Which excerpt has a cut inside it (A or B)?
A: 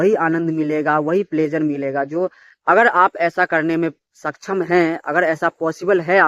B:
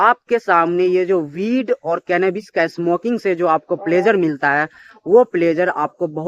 A